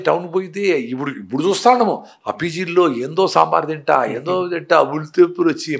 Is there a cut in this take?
no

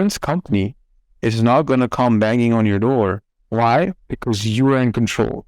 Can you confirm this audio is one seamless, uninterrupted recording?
no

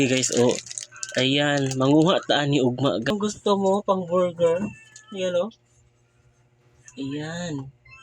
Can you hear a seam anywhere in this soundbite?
yes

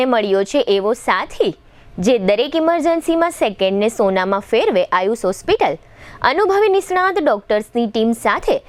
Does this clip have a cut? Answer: no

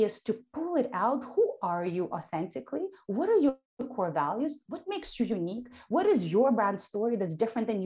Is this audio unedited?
yes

